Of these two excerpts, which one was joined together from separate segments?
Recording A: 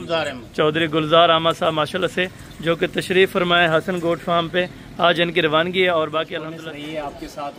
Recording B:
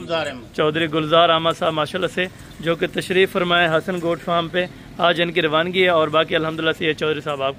A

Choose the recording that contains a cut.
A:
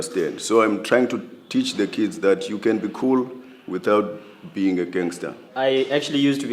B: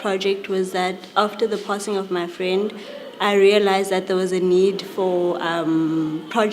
B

